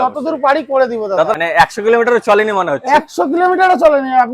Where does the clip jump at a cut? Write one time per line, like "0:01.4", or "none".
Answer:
0:01.4

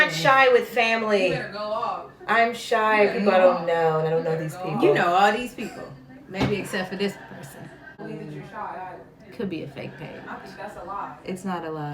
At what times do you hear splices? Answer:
0:08.0

